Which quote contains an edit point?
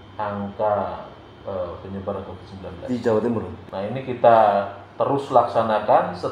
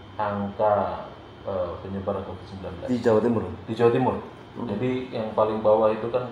first; 1 cut; at 3.6 s

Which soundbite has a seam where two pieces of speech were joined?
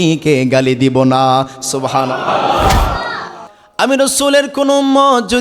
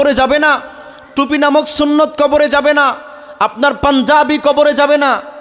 first; 1 cut; at 3.4 s

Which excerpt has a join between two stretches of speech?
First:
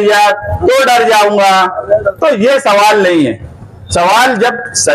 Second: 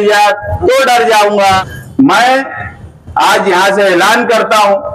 second; 1 cut; at 1.7 s

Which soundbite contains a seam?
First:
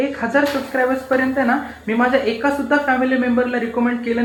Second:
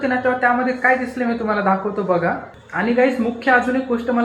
second; 1 cut; at 2.5 s

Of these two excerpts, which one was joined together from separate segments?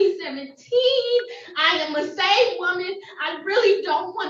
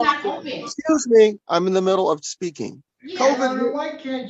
second; 1 cut; at 2.8 s

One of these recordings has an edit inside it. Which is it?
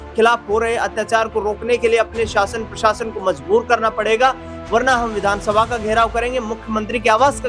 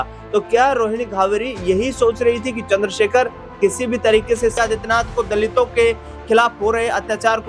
second; 1 cut; at 4.6 s

